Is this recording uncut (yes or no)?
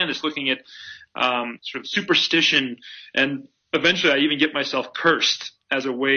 yes